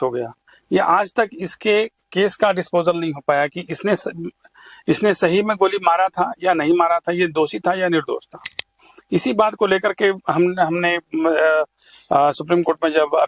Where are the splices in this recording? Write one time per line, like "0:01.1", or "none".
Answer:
none